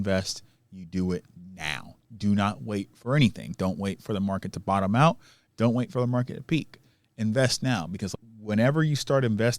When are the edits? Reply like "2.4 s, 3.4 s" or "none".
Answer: 8.1 s